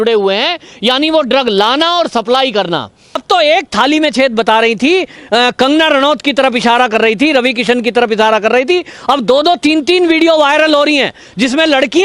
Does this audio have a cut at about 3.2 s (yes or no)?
yes